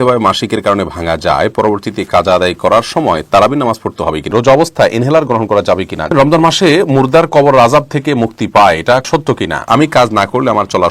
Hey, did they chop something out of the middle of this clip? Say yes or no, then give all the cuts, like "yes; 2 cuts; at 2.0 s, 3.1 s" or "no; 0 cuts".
yes; 3 cuts; at 4.3 s, 6.1 s, 9.2 s